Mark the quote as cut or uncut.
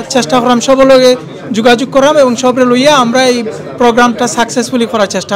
uncut